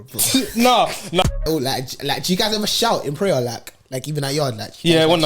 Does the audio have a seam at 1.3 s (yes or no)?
yes